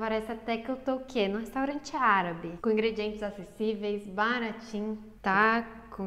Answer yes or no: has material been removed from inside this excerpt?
yes